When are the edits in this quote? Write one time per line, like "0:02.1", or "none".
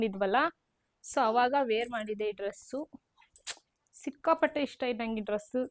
none

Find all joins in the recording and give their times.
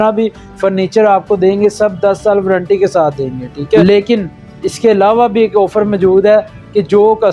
0:03.8

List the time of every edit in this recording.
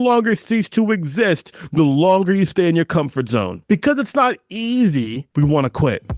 0:03.6
0:05.2

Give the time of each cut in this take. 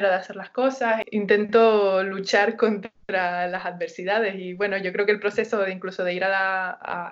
0:01.1

